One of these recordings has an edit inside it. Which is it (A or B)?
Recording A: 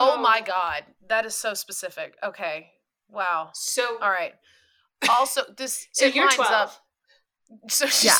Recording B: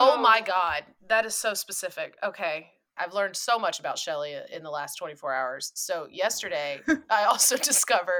B